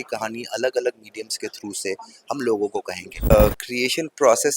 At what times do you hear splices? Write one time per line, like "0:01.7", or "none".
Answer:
0:03.3